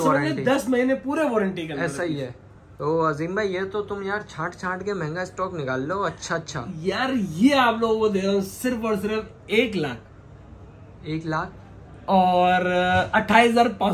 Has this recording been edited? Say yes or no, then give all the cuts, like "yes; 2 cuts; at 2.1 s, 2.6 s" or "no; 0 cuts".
no; 0 cuts